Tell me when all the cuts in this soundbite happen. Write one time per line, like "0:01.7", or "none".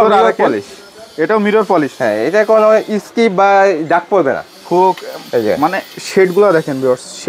none